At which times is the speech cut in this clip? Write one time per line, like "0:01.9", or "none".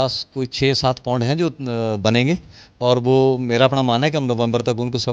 none